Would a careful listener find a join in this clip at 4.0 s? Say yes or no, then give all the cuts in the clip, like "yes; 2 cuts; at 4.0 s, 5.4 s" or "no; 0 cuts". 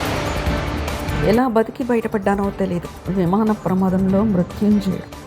no; 1 cut; at 1.1 s